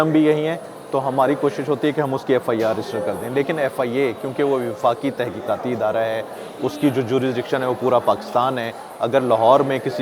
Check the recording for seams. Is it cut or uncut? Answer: uncut